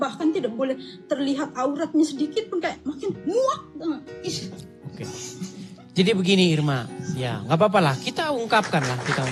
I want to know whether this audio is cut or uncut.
uncut